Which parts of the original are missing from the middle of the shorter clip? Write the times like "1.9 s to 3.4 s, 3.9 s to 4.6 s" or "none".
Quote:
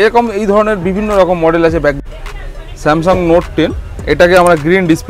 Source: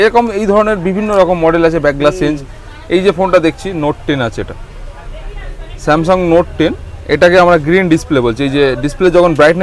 2.0 s to 5.0 s